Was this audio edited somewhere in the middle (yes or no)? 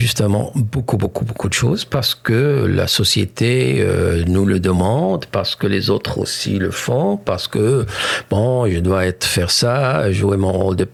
no